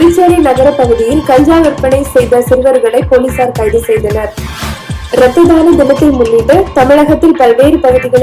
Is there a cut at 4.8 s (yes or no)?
yes